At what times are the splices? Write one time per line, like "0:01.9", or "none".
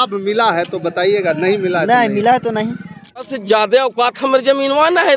0:03.2